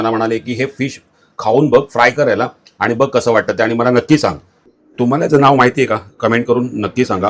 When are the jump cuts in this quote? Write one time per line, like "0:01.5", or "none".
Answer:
0:04.6